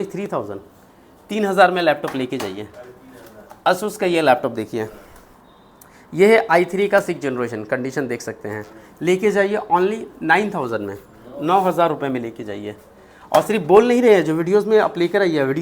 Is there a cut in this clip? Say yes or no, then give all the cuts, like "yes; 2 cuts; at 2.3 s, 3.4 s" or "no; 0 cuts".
no; 0 cuts